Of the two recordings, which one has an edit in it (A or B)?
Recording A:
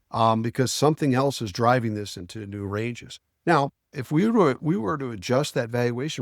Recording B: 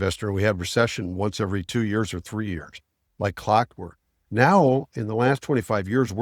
A